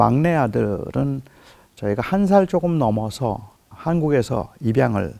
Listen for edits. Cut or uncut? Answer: uncut